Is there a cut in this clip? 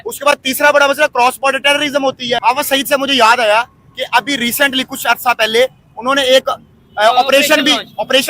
yes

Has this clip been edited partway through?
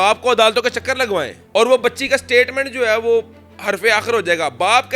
no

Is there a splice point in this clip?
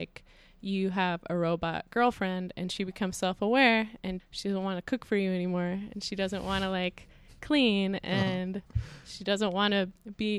yes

